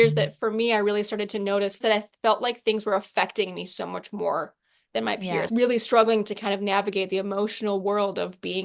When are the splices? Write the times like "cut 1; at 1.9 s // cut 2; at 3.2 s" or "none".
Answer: cut 1; at 1.8 s // cut 2; at 5.5 s